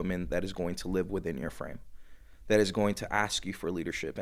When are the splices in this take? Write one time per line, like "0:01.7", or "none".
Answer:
none